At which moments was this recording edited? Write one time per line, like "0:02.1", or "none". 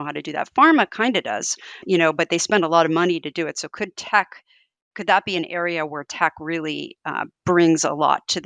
none